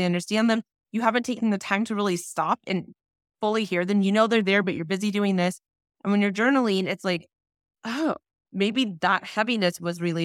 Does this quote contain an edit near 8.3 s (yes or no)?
yes